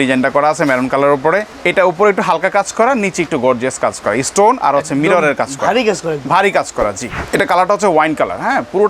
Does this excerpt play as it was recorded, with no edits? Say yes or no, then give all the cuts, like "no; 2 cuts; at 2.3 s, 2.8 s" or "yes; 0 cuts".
no; 2 cuts; at 1.6 s, 7.1 s